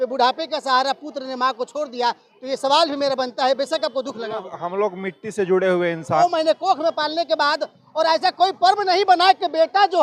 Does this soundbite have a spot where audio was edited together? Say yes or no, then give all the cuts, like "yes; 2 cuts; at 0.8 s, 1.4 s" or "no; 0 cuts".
yes; 1 cut; at 6.2 s